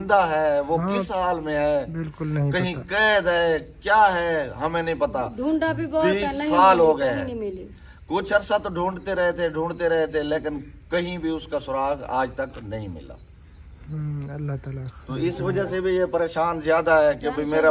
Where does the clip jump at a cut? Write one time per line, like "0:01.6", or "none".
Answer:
none